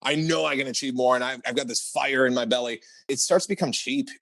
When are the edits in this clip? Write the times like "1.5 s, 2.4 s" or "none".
3.1 s